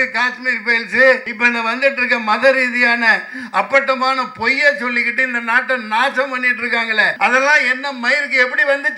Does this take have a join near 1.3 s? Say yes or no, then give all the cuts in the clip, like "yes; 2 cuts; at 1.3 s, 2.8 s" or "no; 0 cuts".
yes; 2 cuts; at 1.3 s, 7.1 s